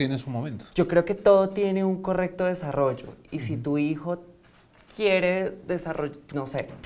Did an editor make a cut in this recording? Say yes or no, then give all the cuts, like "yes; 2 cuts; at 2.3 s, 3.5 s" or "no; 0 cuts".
no; 0 cuts